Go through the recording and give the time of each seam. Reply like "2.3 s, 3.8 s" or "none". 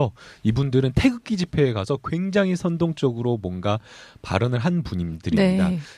3.8 s